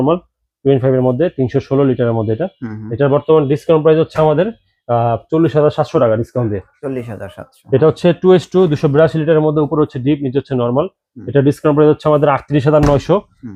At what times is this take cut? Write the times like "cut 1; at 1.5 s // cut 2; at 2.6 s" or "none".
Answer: none

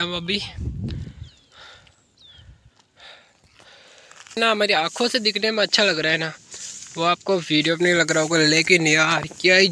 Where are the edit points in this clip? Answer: cut 1; at 4.4 s

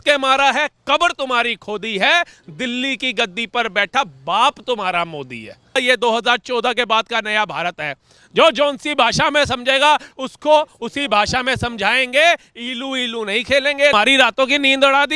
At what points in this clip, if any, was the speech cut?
cut 1; at 5.8 s // cut 2; at 13.9 s

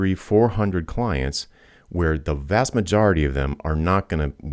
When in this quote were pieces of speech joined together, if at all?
none

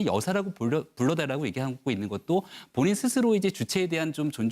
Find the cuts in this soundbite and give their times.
cut 1; at 1.8 s

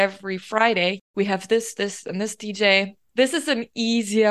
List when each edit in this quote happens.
cut 1; at 1.0 s // cut 2; at 3.0 s

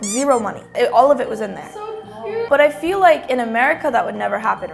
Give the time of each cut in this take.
cut 1; at 2.5 s

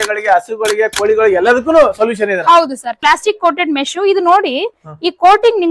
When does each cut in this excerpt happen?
cut 1; at 3.0 s

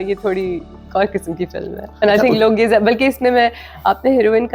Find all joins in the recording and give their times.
none

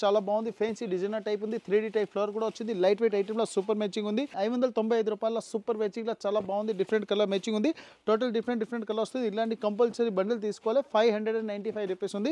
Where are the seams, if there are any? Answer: none

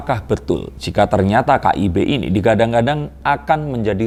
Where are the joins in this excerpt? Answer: none

